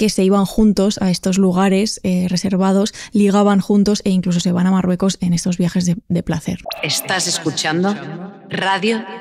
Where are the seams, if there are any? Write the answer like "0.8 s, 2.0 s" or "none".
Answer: 6.6 s

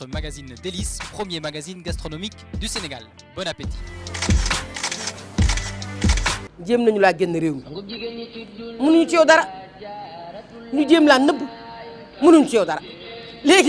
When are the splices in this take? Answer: 6.6 s

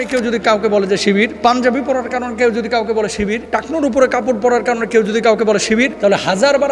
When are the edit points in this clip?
1.3 s, 3.4 s, 5.9 s

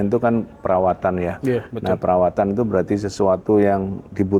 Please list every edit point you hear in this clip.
none

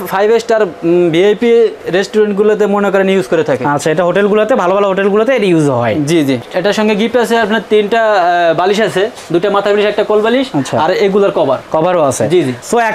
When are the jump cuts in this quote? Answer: 6.4 s

